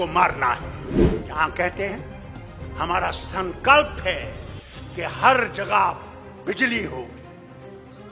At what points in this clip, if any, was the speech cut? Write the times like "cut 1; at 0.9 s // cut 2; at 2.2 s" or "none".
cut 1; at 1.2 s